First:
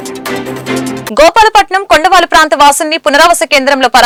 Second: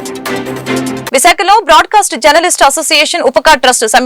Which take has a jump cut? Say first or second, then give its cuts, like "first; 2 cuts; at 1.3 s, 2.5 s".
second; 1 cut; at 1.0 s